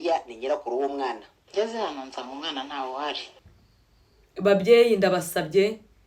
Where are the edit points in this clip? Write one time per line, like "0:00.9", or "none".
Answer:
0:03.3